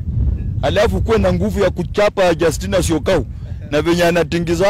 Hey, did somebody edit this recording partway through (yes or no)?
no